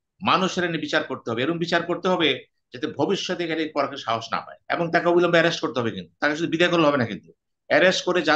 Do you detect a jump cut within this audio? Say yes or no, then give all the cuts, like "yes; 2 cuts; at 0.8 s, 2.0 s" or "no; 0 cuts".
yes; 1 cut; at 4.5 s